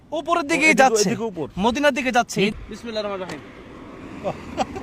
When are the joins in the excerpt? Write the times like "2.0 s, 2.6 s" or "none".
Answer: 2.5 s